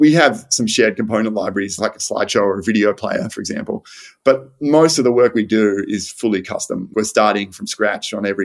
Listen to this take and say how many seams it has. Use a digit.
2